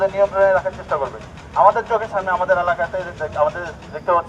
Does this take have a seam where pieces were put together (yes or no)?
no